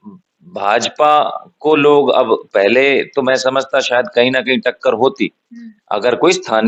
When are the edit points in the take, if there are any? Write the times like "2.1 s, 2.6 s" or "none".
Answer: none